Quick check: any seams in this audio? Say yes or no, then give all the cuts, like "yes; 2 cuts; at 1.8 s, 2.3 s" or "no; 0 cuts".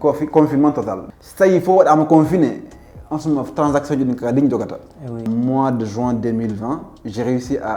yes; 2 cuts; at 1.0 s, 5.2 s